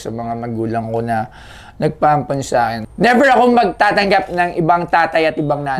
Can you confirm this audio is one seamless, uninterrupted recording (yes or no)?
no